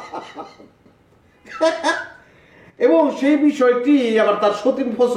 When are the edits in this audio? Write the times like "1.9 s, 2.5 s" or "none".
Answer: none